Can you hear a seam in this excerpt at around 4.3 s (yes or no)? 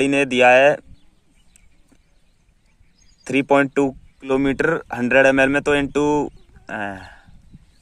yes